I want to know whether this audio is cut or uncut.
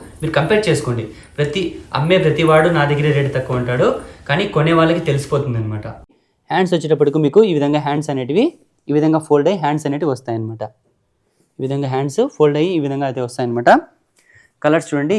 cut